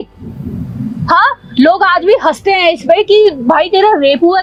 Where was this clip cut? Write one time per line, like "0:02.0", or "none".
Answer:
none